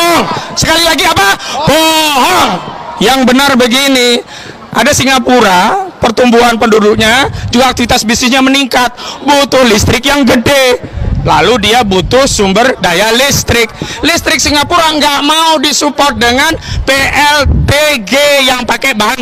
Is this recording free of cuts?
yes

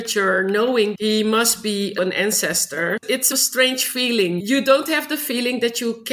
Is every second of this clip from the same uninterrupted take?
no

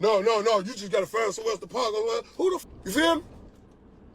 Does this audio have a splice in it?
yes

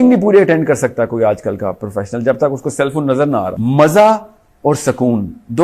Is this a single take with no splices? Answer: no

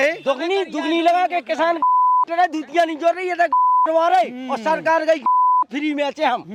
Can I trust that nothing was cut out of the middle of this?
yes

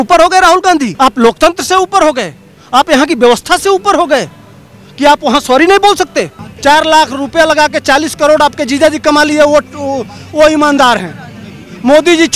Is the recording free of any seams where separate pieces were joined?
no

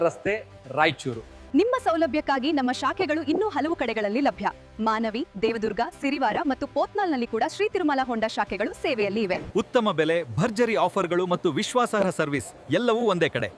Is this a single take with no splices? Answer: yes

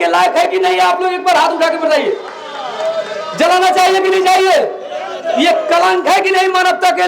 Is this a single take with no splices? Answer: yes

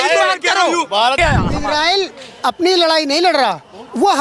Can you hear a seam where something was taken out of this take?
yes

